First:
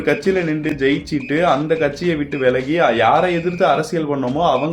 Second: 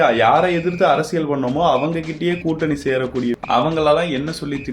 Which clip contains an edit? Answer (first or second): second